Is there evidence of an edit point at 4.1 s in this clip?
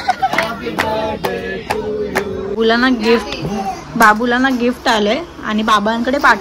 no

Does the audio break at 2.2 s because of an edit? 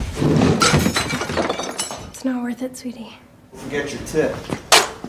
no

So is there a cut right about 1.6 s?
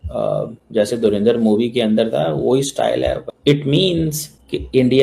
no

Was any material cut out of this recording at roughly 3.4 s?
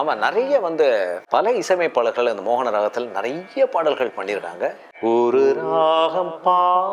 no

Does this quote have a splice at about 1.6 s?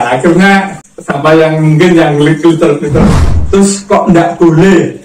no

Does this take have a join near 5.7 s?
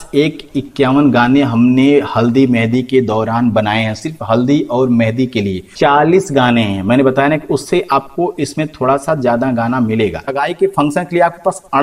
yes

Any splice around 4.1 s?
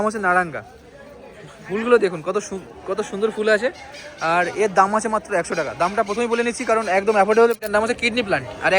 no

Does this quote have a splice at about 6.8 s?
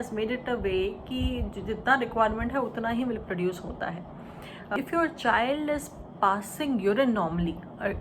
no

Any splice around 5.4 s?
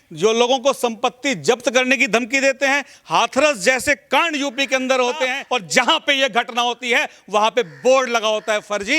yes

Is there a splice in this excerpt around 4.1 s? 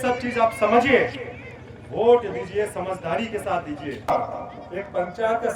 yes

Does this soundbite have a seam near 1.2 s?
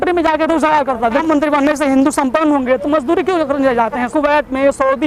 yes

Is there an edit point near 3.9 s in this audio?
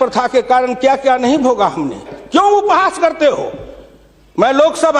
no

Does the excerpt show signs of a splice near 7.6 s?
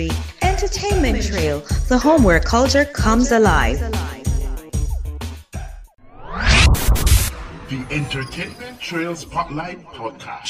no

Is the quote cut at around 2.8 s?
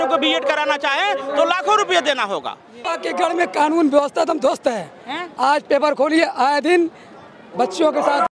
yes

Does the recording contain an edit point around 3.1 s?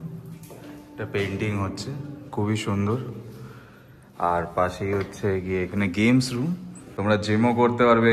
no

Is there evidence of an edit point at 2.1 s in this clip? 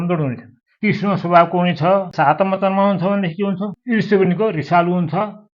yes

